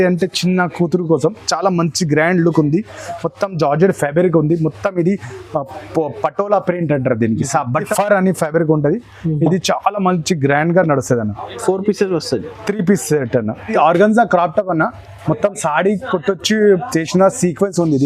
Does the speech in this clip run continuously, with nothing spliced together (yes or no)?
no